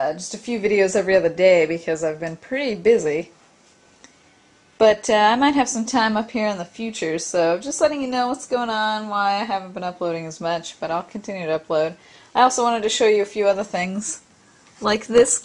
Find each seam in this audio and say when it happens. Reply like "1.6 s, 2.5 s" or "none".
1.7 s